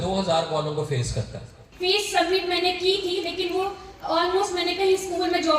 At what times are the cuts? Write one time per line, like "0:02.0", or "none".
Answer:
0:01.6